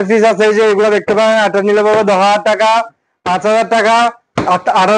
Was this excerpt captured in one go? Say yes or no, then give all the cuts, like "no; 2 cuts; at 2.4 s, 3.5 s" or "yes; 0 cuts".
yes; 0 cuts